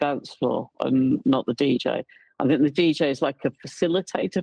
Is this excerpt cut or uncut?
uncut